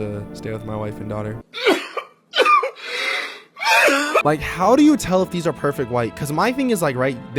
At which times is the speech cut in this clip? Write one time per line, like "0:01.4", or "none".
0:01.4
0:04.2